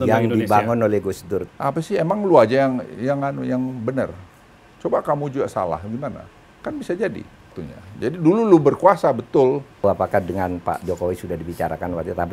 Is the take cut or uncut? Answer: cut